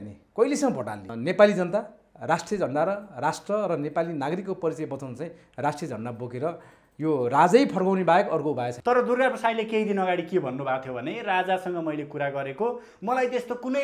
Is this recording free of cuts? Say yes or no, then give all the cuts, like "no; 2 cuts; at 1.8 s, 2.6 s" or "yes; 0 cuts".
no; 2 cuts; at 1.1 s, 8.7 s